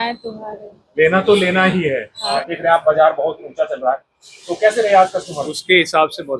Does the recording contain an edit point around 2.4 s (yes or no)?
yes